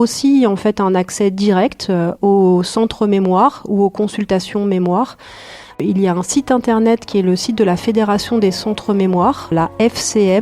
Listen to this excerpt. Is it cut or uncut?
cut